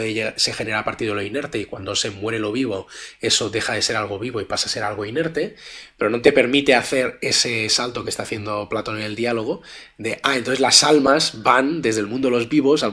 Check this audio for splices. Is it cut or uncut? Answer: uncut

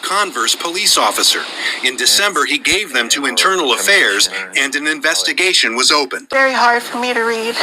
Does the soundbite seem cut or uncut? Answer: cut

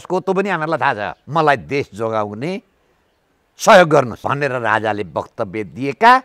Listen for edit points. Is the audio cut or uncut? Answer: cut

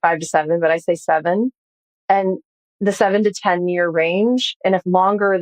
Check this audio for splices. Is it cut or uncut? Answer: uncut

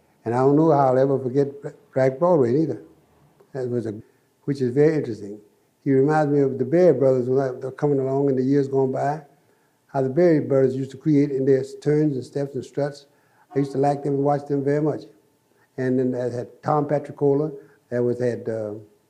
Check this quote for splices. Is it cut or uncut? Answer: uncut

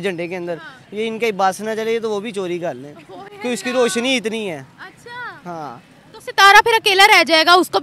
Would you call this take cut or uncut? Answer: uncut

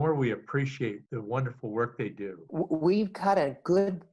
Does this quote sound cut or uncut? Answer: cut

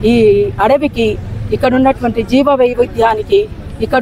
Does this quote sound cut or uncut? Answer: uncut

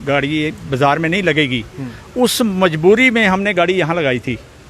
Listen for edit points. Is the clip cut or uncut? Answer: uncut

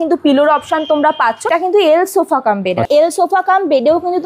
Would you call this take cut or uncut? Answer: cut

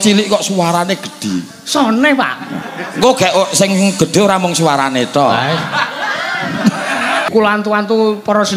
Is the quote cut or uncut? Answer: cut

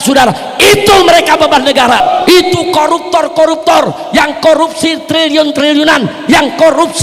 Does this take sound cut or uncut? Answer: cut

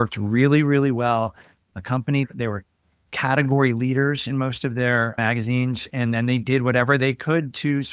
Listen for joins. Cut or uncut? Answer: cut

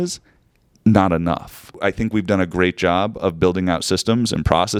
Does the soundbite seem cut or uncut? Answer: uncut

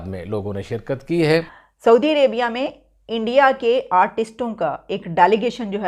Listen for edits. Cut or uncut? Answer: cut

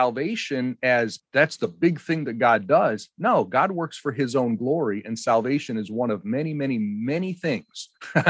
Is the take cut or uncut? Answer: cut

